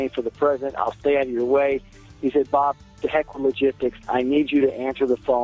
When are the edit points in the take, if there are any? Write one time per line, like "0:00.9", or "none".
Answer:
none